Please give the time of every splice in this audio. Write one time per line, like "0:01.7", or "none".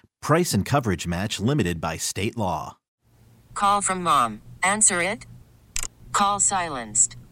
0:02.8